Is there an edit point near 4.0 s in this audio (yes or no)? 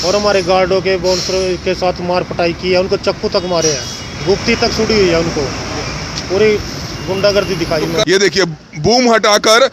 no